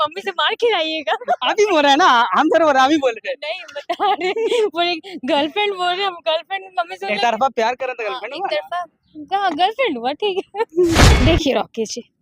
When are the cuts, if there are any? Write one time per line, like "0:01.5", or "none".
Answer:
0:11.1